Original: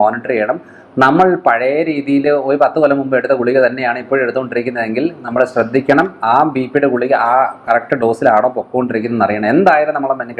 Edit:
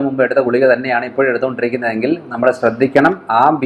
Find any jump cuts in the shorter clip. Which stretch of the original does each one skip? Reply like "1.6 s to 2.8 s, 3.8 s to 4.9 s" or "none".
none